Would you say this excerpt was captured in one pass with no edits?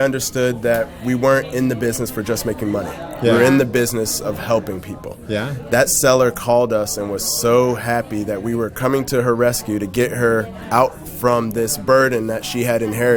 yes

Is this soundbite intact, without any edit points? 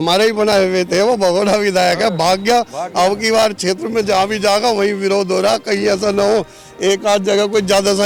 yes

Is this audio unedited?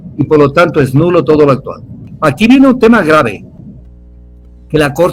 no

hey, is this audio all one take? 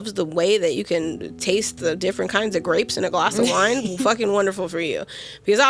yes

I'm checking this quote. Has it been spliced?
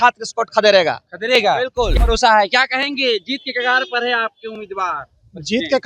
yes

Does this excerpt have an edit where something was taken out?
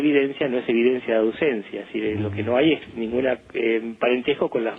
no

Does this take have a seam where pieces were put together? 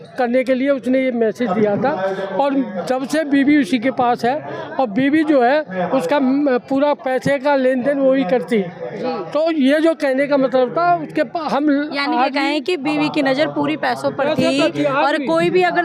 no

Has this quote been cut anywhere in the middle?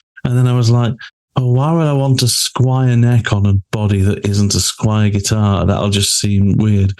no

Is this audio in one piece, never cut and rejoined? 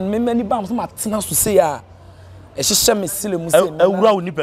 yes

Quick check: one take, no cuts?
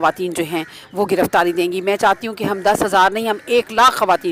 yes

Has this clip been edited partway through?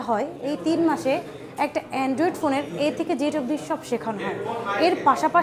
no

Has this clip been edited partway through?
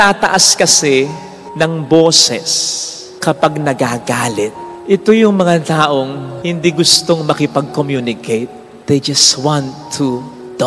no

